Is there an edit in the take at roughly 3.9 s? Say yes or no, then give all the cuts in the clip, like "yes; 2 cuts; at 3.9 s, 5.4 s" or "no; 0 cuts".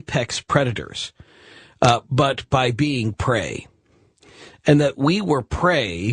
yes; 1 cut; at 3.9 s